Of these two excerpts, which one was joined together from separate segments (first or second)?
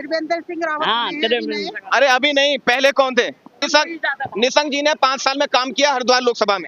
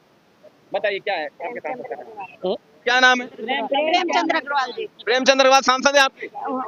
first